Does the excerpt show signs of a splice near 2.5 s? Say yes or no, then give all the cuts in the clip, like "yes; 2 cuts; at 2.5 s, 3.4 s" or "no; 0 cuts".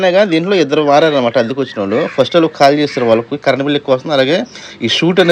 no; 0 cuts